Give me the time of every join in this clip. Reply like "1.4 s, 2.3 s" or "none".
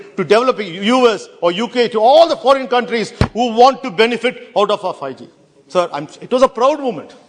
none